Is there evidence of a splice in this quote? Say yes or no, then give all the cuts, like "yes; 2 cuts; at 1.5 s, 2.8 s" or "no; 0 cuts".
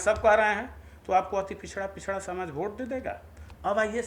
no; 0 cuts